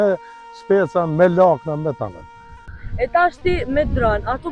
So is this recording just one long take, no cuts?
yes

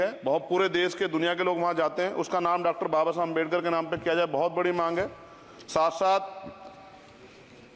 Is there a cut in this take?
no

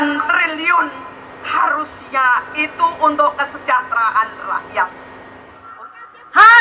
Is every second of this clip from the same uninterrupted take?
no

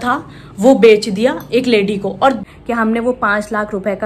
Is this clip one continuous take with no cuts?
no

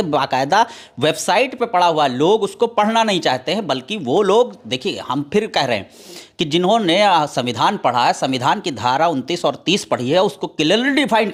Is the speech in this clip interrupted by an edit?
no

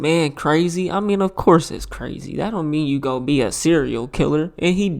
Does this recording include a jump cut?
no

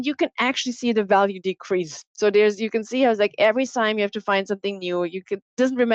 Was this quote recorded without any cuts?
yes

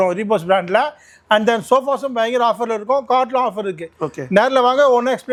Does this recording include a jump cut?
no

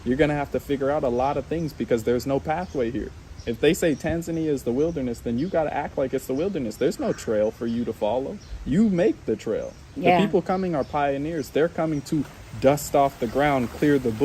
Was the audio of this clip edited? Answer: no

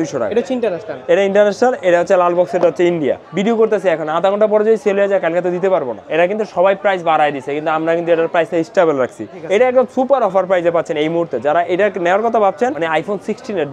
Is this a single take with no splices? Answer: no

